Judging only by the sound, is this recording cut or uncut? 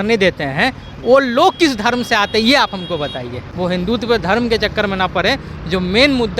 cut